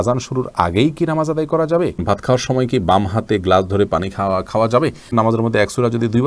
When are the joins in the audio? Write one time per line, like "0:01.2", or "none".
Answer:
0:02.0
0:05.1

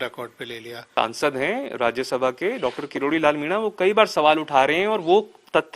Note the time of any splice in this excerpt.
0:00.9

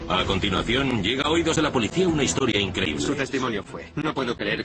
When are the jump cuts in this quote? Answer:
none

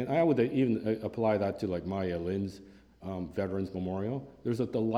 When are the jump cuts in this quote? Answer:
0:03.0

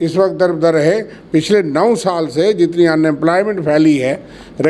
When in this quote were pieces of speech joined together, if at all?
none

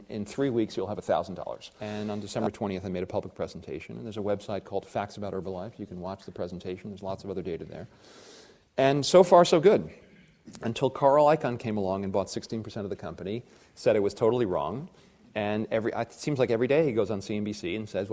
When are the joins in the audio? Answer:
0:01.7

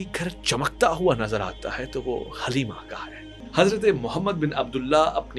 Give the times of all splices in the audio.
0:03.4

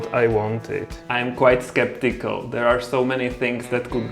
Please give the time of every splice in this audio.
0:01.0

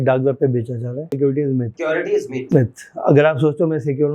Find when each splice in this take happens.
0:01.1

